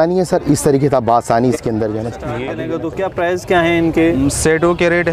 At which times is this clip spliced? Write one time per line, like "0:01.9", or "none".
0:02.5